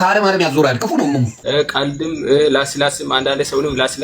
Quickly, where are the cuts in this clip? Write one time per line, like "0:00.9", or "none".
0:01.3